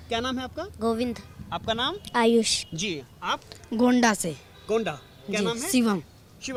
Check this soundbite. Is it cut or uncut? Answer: uncut